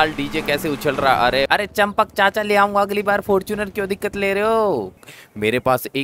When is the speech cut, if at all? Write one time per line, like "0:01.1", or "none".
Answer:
0:01.5
0:04.9